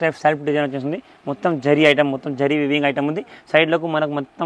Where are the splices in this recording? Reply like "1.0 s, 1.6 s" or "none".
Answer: none